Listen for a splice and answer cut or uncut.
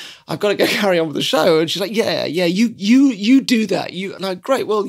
uncut